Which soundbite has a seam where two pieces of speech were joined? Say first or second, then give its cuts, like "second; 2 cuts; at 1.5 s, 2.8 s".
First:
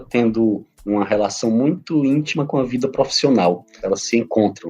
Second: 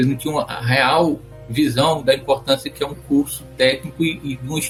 first; 1 cut; at 3.7 s